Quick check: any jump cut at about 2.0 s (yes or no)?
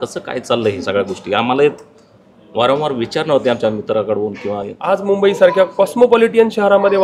no